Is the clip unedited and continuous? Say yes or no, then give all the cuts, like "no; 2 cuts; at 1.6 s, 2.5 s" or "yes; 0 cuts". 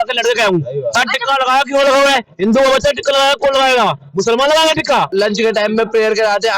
no; 1 cut; at 5.1 s